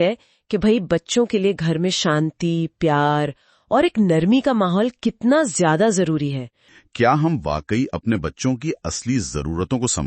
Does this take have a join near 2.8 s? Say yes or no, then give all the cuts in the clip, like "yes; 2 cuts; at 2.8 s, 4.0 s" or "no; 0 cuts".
no; 1 cut; at 6.7 s